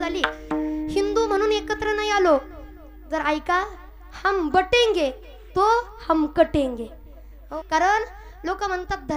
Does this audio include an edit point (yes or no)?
yes